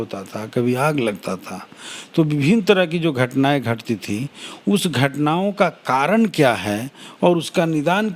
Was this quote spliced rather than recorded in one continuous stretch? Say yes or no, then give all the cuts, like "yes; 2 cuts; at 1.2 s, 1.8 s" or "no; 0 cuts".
no; 0 cuts